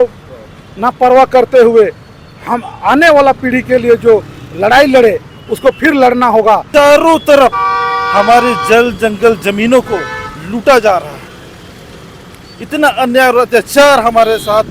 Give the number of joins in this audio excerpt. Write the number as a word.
one